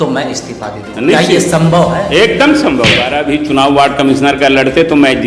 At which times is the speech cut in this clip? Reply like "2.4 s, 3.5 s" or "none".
3.1 s